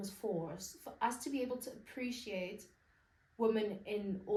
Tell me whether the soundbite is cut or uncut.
uncut